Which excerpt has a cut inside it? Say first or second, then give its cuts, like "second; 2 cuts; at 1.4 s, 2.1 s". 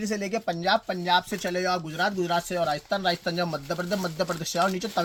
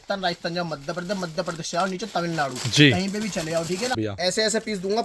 second; 1 cut; at 3.9 s